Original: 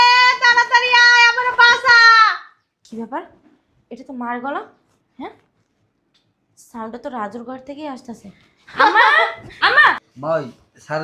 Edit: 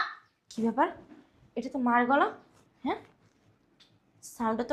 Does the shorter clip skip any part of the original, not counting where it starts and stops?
no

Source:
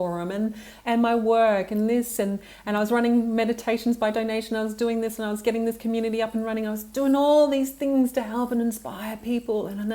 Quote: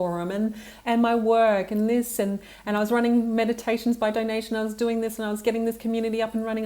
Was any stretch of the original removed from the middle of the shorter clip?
no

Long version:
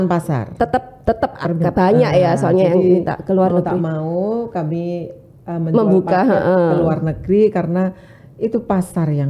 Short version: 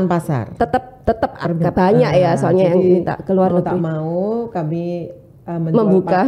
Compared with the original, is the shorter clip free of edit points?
yes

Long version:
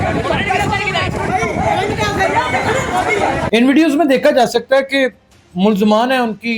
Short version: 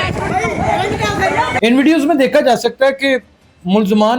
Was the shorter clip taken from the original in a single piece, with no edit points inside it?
no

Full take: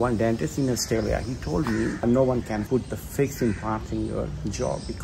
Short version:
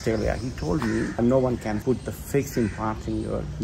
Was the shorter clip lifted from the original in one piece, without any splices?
yes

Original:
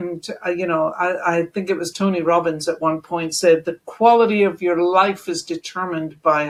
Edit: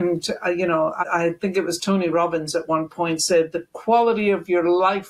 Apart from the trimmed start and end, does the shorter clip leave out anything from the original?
yes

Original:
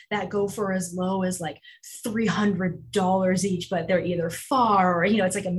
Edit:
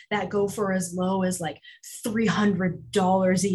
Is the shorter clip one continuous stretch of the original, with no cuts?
yes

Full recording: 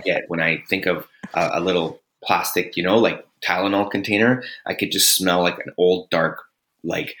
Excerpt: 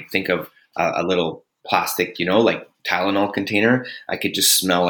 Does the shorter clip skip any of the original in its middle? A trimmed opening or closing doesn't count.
no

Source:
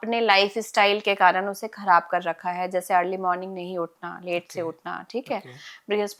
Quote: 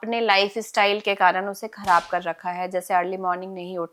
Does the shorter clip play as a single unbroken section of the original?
yes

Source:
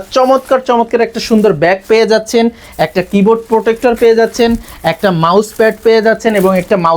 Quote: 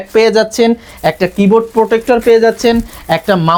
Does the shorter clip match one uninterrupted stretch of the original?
yes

